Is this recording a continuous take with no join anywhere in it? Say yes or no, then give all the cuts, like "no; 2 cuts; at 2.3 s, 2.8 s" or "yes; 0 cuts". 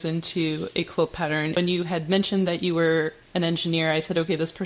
no; 1 cut; at 1.5 s